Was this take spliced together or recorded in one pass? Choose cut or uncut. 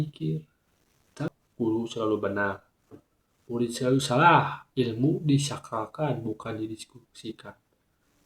cut